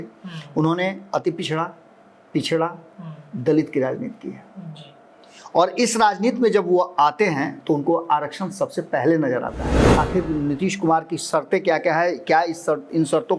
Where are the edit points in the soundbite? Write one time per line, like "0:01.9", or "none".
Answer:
0:09.9